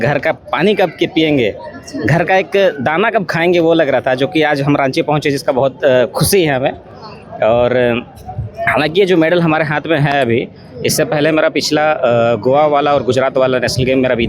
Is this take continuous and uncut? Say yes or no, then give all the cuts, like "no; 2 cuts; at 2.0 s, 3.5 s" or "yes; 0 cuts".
yes; 0 cuts